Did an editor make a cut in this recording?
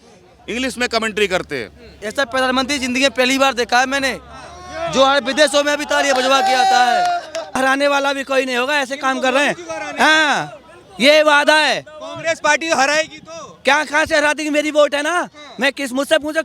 yes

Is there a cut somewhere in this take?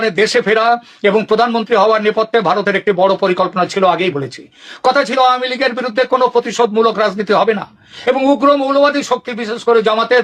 no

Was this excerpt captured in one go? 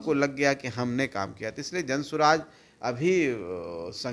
yes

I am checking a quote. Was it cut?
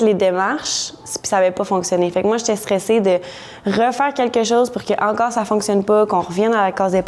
no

